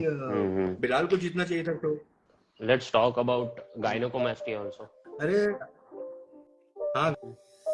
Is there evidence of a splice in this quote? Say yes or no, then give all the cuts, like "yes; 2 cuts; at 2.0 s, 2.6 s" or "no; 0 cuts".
no; 0 cuts